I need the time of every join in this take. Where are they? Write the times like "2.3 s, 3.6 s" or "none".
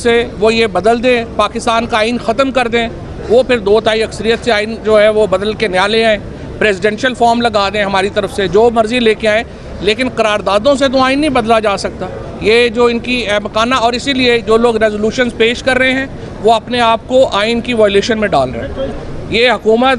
18.9 s